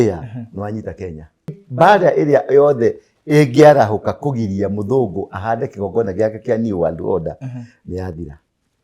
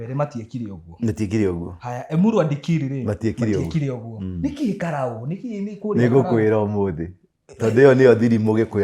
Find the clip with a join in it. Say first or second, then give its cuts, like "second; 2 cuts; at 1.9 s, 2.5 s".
first; 1 cut; at 1.6 s